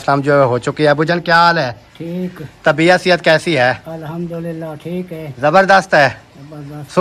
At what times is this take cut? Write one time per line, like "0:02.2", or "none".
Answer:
none